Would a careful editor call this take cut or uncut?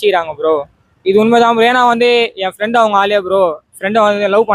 uncut